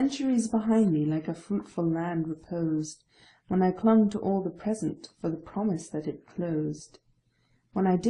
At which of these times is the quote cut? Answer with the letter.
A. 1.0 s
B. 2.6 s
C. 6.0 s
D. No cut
A